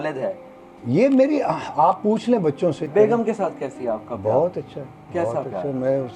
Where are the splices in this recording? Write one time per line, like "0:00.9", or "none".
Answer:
0:02.8